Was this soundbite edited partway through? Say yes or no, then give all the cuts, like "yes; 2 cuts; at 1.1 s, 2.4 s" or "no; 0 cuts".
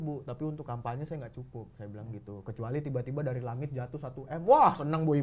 no; 0 cuts